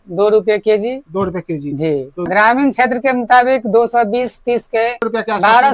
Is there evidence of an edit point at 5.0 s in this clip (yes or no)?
yes